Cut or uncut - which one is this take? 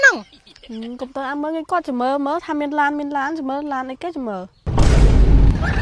cut